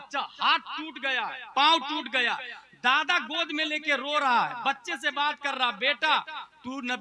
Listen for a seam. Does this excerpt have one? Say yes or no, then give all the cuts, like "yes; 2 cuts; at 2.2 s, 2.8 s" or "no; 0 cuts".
no; 0 cuts